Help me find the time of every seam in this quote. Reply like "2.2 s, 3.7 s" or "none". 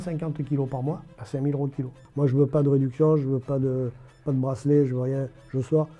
1.1 s, 2.0 s